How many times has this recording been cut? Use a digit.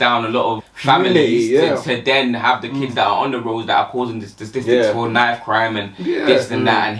0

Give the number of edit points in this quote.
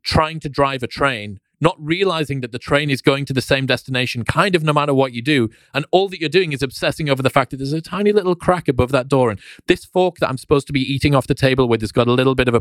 0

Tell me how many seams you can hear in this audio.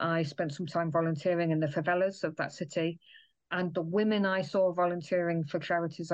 0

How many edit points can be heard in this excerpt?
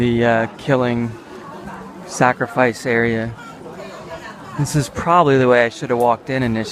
1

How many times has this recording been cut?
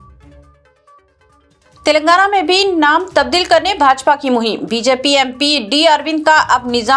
1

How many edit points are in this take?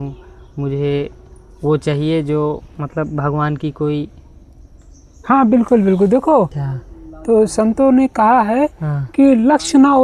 1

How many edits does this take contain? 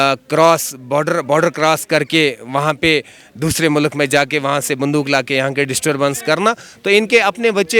0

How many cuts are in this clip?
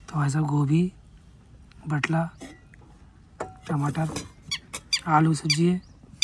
0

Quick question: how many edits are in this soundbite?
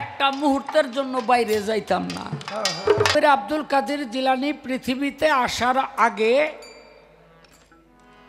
1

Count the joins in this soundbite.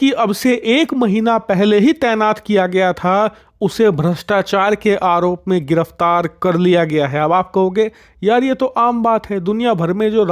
0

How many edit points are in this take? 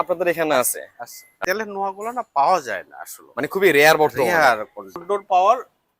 2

